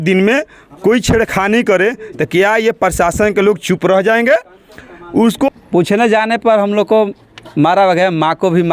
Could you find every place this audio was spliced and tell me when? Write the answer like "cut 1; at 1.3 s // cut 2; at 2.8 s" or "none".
cut 1; at 5.5 s